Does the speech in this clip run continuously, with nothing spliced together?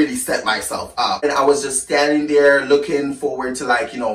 no; 1 cut; at 1.2 s

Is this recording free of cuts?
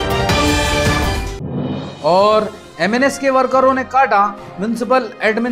no; 1 cut; at 1.4 s

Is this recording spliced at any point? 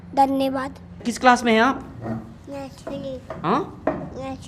yes; 1 cut; at 1.1 s

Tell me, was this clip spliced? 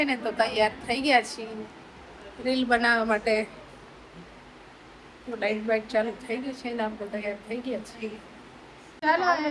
no; 0 cuts

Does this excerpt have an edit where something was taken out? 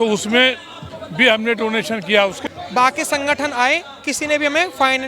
yes; 1 cut; at 2.4 s

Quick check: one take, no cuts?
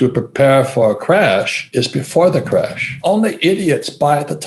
no; 2 cuts; at 1.6 s, 3.0 s

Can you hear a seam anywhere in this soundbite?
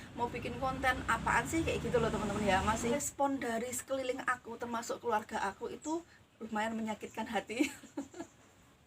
yes; 1 cut; at 3.0 s

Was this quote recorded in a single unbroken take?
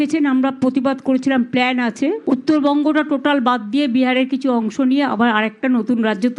yes; 0 cuts

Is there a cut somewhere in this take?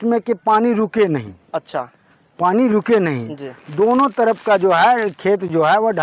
no; 0 cuts

